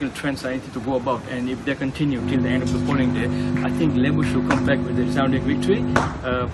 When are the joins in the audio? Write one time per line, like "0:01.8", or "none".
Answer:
none